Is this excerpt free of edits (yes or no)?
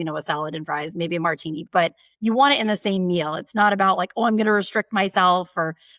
no